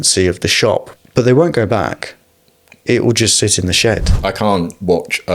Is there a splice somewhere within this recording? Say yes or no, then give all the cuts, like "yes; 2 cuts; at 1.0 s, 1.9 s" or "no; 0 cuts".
yes; 2 cuts; at 0.9 s, 4.2 s